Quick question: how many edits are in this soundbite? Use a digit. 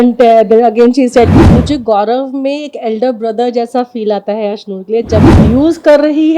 2